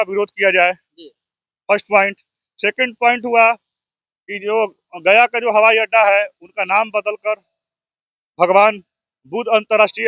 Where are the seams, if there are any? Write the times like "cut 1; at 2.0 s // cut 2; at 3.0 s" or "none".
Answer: none